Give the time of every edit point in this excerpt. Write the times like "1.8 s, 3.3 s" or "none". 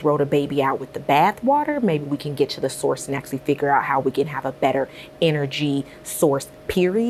none